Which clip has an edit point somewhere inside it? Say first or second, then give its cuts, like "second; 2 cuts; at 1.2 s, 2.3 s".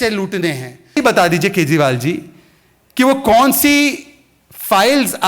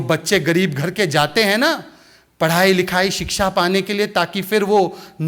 first; 1 cut; at 1.0 s